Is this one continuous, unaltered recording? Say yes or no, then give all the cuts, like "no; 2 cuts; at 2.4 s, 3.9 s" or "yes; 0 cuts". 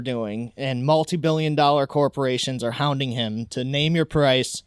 yes; 0 cuts